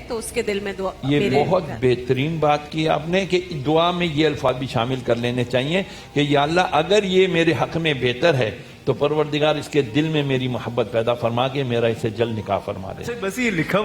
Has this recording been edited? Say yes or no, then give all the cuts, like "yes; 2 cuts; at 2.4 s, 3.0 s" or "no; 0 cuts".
no; 0 cuts